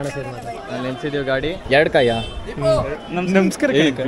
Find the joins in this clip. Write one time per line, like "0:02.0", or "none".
0:01.6
0:03.0